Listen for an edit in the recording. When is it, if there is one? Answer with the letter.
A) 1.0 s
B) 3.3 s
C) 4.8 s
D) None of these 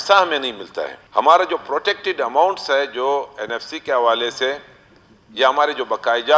A